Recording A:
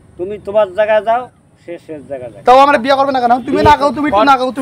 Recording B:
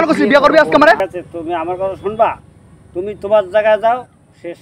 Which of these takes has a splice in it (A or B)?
B